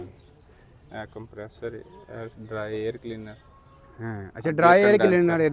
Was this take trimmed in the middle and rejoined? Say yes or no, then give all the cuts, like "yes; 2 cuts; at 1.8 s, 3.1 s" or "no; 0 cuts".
no; 0 cuts